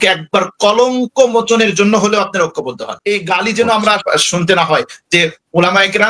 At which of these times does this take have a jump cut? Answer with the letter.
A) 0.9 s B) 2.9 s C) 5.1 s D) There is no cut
B